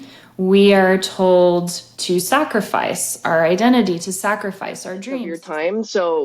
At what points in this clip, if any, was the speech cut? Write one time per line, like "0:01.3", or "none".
0:05.3